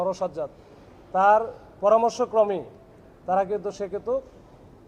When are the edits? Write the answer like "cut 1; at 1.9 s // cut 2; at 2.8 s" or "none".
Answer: none